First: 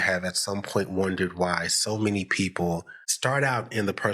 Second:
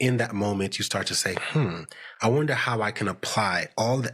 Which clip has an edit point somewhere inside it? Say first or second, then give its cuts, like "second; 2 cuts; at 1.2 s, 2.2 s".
first; 1 cut; at 3.1 s